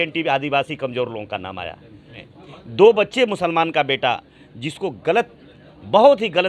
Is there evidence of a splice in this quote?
yes; 1 cut; at 2.2 s

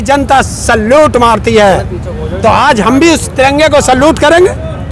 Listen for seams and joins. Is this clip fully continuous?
yes; 0 cuts

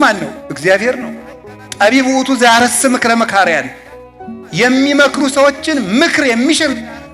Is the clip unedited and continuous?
yes; 0 cuts

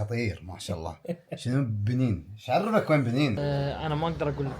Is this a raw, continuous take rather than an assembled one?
no; 1 cut; at 3.4 s

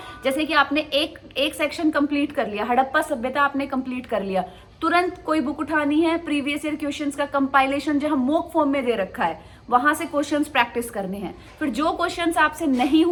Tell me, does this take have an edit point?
no; 0 cuts

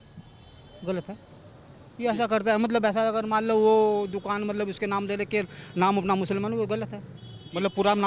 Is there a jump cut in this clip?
no; 0 cuts

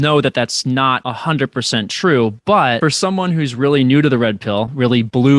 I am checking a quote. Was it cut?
yes; 2 cuts; at 1.1 s, 2.8 s

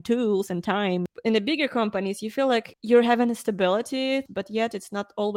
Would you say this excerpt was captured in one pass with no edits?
no; 3 cuts; at 1.0 s, 2.7 s, 4.2 s

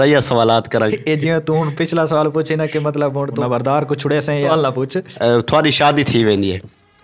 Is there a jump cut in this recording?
yes; 3 cuts; at 0.9 s, 3.4 s, 4.5 s

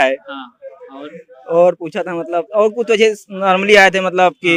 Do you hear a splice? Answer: no; 0 cuts

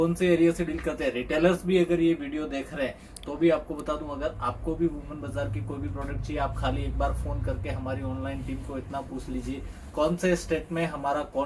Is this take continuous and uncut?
yes; 0 cuts

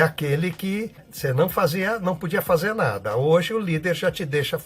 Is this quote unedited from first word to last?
no; 1 cut; at 1.1 s

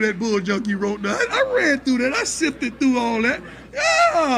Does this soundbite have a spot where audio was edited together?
no; 0 cuts

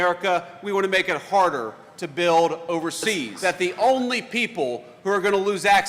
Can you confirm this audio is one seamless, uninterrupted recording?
no; 1 cut; at 3.3 s

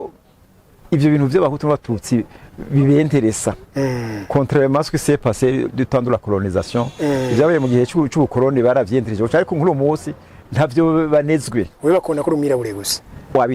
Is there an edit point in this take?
no; 0 cuts

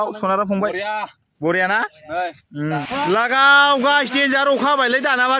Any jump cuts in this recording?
yes; 1 cut; at 2.6 s

